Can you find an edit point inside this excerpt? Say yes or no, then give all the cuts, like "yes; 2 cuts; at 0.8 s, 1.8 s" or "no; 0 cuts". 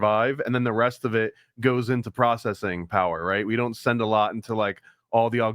no; 0 cuts